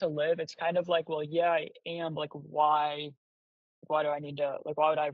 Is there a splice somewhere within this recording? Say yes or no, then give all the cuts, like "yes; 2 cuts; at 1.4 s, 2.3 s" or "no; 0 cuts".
no; 0 cuts